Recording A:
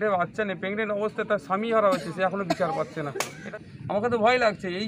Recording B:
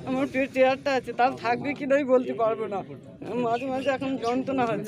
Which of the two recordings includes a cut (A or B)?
A